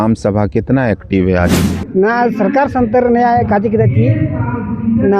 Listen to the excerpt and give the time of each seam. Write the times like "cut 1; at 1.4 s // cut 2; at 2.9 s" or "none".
cut 1; at 1.6 s